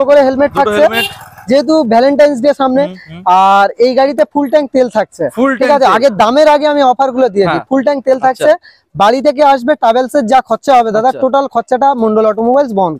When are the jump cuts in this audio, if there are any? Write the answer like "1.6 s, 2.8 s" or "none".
none